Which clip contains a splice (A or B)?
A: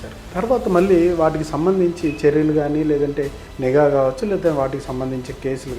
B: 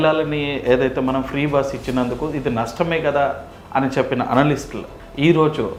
A